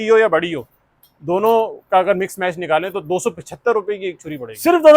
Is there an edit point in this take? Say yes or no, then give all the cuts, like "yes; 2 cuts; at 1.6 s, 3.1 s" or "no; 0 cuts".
no; 0 cuts